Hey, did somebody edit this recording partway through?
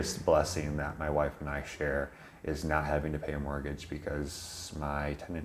no; 0 cuts

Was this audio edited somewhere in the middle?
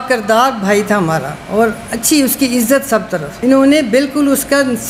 no; 0 cuts

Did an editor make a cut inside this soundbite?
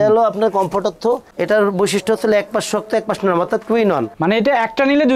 no; 0 cuts

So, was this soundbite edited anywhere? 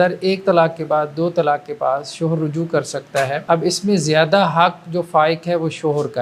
yes; 1 cut; at 3.4 s

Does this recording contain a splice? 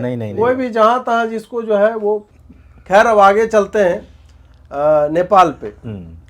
no; 0 cuts

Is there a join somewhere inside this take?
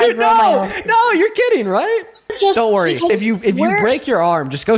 yes; 2 cuts; at 2.3 s, 3.1 s

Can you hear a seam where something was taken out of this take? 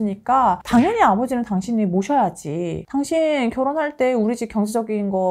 yes; 1 cut; at 2.8 s

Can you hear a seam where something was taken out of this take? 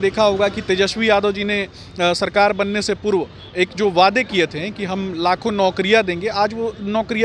no; 0 cuts

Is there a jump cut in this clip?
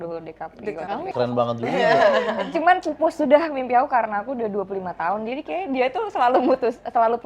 yes; 1 cut; at 1.1 s

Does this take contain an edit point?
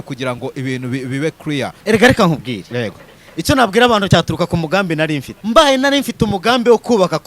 yes; 3 cuts; at 1.7 s, 4.1 s, 5.3 s

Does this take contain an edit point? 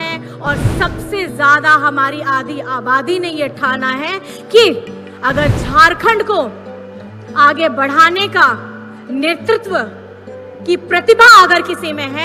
no; 0 cuts

